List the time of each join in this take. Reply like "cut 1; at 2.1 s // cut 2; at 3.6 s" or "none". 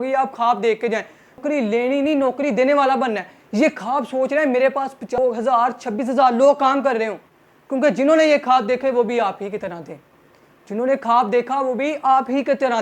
none